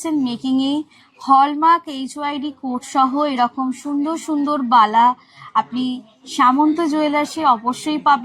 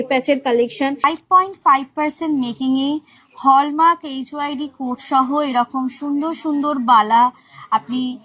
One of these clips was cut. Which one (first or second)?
second